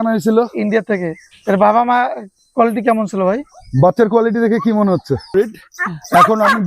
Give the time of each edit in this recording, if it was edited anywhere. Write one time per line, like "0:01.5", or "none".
0:05.3